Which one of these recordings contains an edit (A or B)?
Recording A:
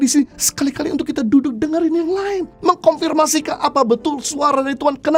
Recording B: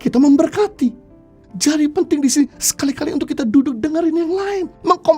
B